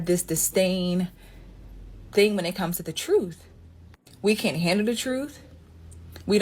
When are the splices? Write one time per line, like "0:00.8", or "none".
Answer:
0:05.0